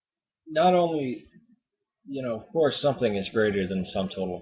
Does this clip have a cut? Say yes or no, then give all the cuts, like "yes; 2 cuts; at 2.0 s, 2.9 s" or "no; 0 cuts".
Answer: no; 0 cuts